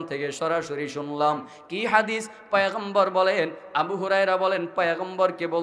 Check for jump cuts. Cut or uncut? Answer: uncut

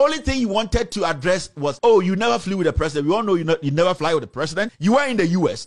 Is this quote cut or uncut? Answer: cut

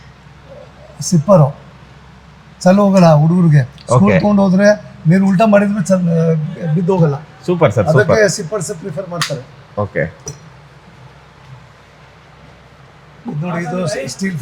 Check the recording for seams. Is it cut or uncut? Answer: uncut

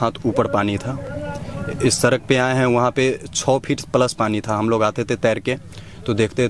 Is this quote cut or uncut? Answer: uncut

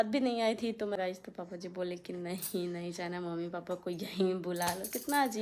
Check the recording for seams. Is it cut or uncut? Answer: cut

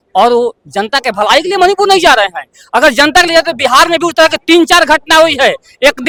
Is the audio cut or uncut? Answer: uncut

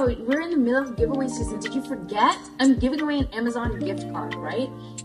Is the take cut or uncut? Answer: uncut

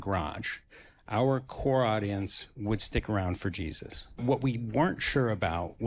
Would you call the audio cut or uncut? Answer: cut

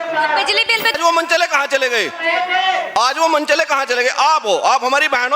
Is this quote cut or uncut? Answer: cut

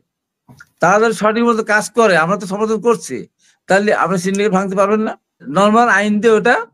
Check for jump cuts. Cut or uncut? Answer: cut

